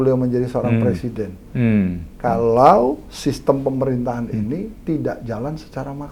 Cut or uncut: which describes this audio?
uncut